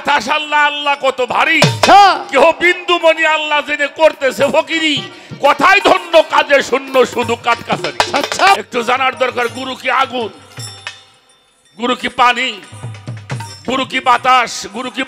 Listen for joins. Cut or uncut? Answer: cut